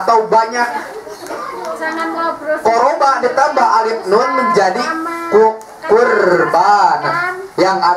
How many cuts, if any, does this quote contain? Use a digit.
0